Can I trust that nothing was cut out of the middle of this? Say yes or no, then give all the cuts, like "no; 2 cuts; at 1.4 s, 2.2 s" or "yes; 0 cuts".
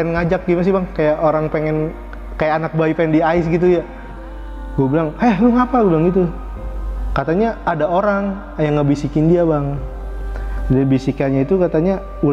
yes; 0 cuts